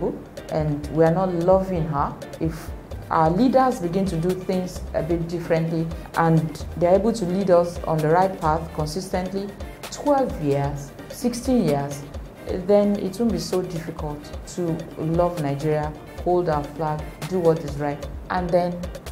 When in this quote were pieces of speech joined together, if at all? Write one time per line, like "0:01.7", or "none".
0:18.1